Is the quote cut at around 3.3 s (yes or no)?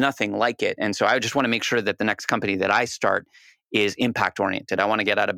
no